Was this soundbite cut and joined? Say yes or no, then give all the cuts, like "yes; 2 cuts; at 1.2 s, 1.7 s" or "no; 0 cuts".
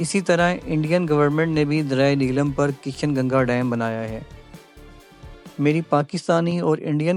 no; 0 cuts